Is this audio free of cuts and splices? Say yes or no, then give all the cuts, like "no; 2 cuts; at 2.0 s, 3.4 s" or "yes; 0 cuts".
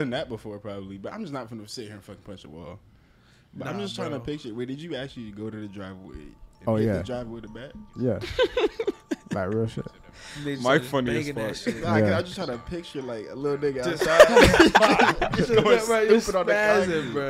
yes; 0 cuts